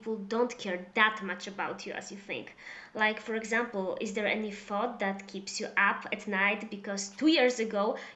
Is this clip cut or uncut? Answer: uncut